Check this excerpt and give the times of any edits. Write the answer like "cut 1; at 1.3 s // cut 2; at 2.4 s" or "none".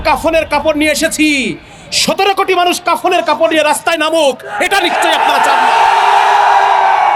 none